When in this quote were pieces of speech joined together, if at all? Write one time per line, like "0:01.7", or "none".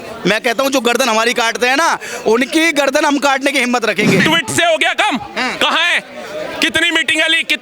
0:04.2